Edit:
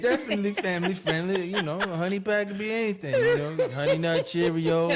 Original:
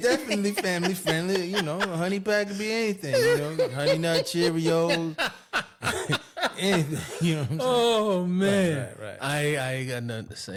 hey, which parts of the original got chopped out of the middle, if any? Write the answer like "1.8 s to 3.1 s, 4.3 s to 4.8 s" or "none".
none